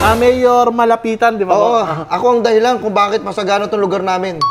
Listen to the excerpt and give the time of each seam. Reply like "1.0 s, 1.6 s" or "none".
none